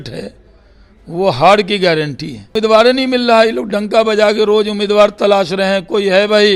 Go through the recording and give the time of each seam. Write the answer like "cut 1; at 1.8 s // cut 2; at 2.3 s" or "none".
cut 1; at 2.5 s

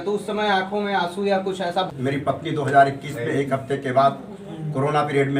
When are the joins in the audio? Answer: cut 1; at 1.8 s

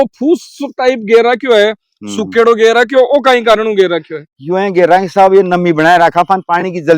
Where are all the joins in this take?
none

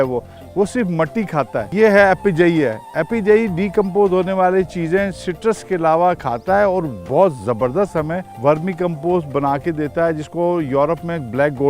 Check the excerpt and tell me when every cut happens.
cut 1; at 1.6 s // cut 2; at 8.2 s

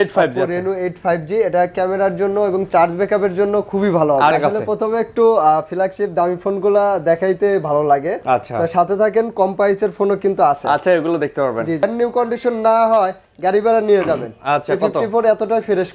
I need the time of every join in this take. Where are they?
cut 1; at 4.3 s // cut 2; at 11.8 s

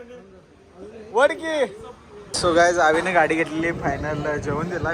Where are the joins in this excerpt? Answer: cut 1; at 2.3 s

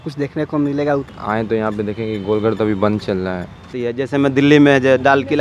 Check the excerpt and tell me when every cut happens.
cut 1; at 1.1 s // cut 2; at 3.6 s

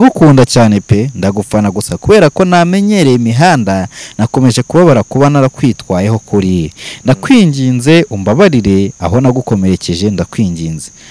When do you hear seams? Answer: none

